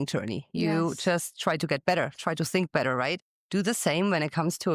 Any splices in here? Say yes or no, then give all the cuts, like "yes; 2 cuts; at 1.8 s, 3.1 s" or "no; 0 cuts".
no; 0 cuts